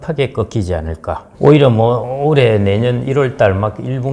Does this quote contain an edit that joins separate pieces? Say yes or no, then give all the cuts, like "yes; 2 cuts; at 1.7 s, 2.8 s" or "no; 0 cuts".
yes; 1 cut; at 1.2 s